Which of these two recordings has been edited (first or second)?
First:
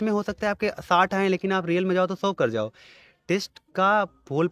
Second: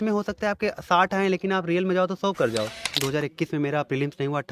second